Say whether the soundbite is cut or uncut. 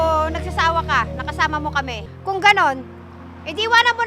cut